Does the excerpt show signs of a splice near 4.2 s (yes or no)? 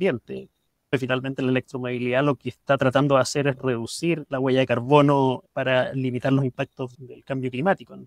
no